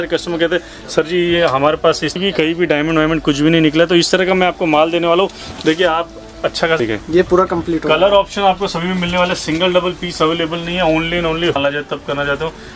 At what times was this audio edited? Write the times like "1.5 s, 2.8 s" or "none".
2.2 s, 6.8 s, 11.6 s

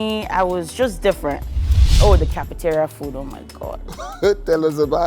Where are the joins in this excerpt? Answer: 2.0 s

